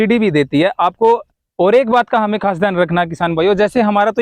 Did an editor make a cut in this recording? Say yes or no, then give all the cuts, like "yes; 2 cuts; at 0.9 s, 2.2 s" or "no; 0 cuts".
yes; 1 cut; at 1.4 s